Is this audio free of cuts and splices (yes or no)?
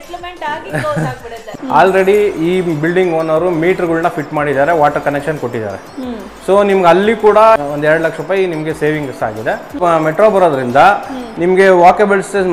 no